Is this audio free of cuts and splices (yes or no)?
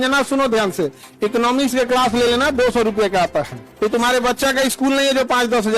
no